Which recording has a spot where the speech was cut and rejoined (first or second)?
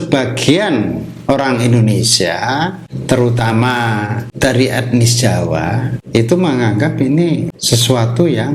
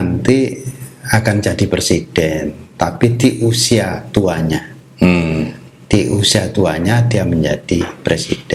first